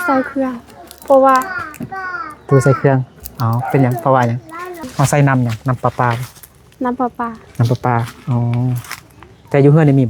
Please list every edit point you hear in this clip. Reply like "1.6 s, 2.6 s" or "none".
4.9 s